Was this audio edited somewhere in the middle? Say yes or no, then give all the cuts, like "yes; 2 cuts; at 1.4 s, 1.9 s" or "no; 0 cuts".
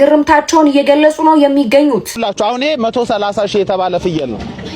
yes; 1 cut; at 2.1 s